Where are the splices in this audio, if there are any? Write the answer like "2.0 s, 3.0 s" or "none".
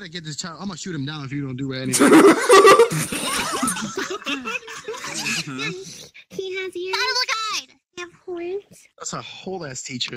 5.2 s

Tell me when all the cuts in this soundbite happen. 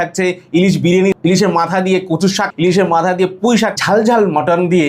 1.1 s, 2.5 s, 3.8 s

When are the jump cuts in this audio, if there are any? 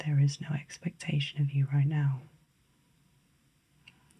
2.5 s

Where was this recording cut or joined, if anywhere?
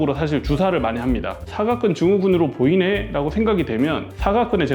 none

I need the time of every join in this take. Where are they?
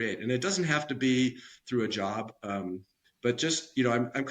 3.0 s

